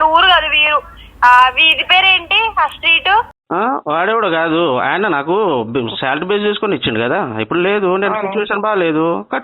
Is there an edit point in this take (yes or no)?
yes